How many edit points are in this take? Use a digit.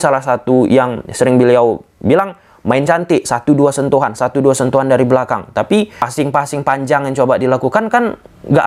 0